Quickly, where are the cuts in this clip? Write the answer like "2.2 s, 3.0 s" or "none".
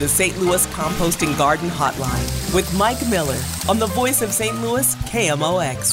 none